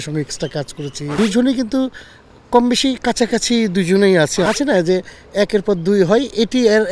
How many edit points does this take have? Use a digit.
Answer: 2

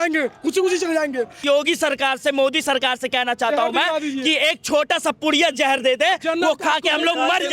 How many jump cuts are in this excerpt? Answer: 1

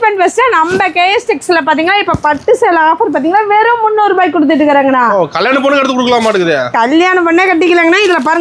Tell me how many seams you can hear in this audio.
0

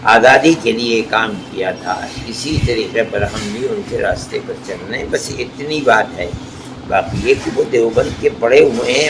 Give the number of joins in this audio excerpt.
0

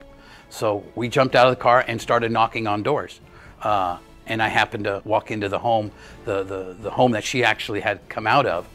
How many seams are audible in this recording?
1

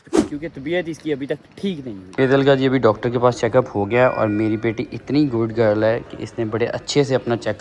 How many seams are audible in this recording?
0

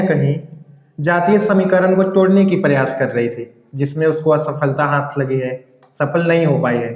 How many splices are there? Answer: 0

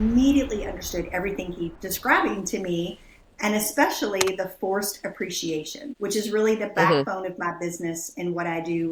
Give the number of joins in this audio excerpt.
0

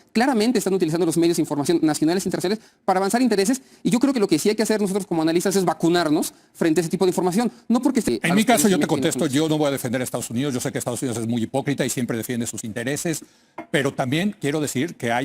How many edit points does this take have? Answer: 1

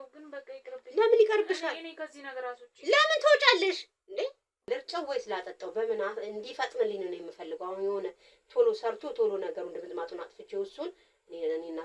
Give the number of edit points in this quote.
1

